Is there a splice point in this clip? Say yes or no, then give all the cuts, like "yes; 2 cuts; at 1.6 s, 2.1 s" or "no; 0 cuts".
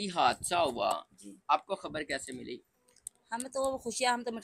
no; 0 cuts